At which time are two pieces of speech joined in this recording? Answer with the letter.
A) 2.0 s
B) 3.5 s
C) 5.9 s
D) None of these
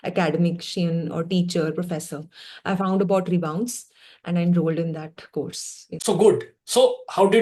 D